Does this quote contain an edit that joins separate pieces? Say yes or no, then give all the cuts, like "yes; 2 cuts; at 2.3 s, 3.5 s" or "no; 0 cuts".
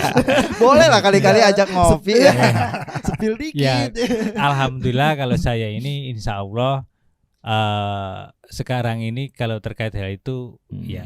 no; 0 cuts